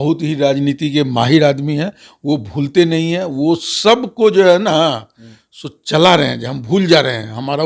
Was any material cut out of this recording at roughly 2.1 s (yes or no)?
no